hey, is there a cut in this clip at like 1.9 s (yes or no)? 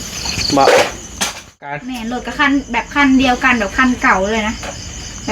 yes